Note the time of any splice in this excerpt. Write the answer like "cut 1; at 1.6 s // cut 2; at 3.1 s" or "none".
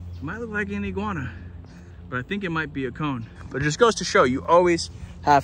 none